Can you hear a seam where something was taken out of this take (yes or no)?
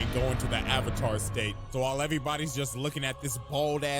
no